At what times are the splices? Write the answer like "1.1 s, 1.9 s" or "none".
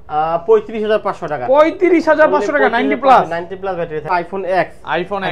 4.1 s